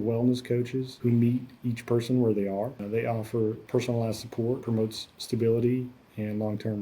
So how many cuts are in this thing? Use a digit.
1